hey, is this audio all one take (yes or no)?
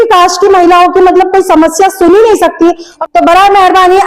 no